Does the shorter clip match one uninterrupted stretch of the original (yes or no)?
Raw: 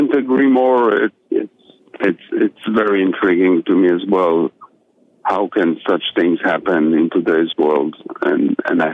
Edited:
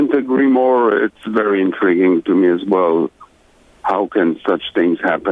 no